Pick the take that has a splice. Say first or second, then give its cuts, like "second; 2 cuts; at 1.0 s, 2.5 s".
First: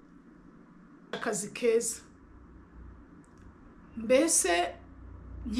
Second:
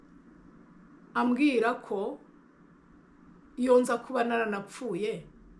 first; 1 cut; at 1.1 s